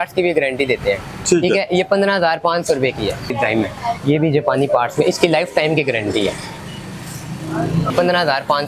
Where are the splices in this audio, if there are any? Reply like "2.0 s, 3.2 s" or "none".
3.3 s, 7.9 s